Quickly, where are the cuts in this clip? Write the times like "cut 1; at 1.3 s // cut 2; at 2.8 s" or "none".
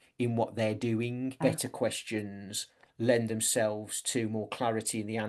cut 1; at 1.4 s